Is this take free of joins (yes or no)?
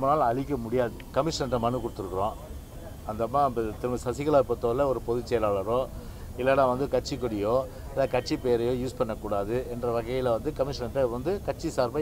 no